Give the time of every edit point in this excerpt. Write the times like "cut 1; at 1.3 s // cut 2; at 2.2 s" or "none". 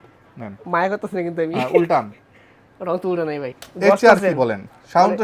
cut 1; at 3.5 s

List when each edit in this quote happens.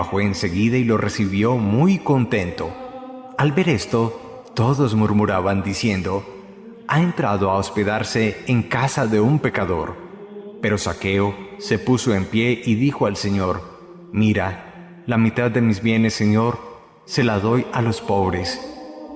none

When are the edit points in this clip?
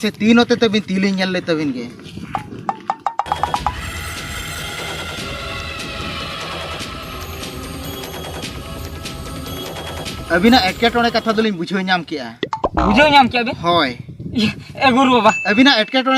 none

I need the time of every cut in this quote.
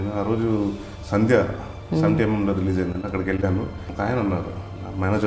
cut 1; at 0.9 s // cut 2; at 3.8 s

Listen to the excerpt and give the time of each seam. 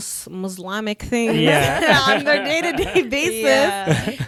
none

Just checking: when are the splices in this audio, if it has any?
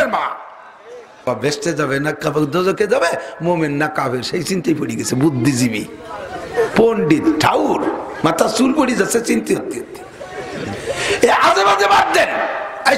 cut 1; at 1.3 s

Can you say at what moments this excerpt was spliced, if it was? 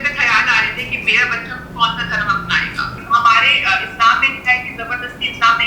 cut 1; at 2.9 s

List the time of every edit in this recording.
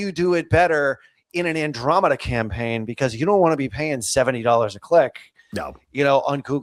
none

